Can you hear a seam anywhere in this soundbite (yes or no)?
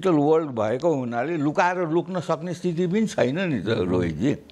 no